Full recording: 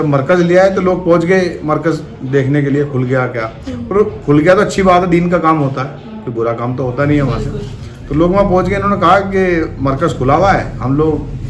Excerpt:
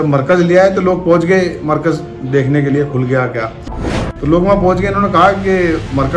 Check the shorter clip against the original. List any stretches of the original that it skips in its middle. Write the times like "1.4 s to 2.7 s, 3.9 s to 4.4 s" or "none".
3.7 s to 7.6 s